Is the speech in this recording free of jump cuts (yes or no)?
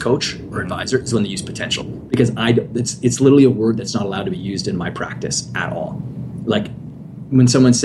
yes